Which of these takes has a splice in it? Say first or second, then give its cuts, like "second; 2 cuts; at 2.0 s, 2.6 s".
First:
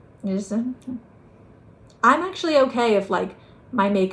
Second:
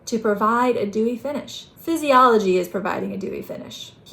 second; 1 cut; at 1.7 s